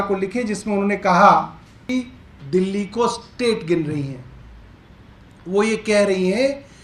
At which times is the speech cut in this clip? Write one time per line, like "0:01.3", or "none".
0:01.9